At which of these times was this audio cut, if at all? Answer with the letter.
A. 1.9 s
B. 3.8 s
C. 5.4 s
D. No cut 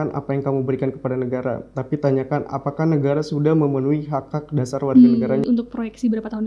C